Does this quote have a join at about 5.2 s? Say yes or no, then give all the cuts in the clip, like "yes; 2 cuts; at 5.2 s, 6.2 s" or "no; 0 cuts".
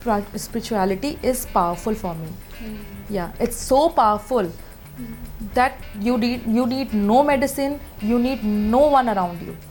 no; 0 cuts